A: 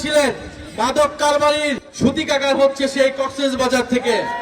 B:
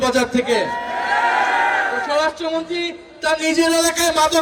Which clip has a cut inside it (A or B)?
A